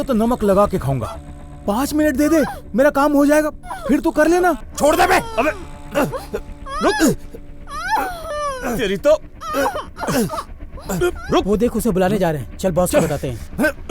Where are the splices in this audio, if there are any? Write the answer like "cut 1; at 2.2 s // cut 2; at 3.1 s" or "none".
cut 1; at 4.7 s // cut 2; at 11.2 s

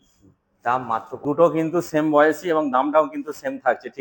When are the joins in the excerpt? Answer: cut 1; at 1.2 s

